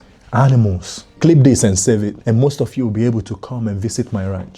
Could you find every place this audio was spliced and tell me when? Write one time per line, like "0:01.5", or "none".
0:01.0
0:02.2